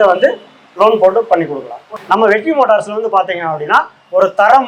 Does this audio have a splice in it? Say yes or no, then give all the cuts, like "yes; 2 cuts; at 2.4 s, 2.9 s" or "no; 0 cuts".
yes; 1 cut; at 1.9 s